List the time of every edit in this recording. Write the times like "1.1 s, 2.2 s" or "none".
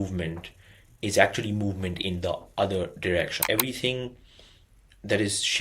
3.4 s